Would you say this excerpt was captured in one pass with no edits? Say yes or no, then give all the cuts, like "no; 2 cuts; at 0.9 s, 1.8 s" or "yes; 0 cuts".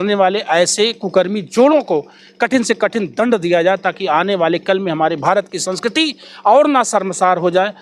yes; 0 cuts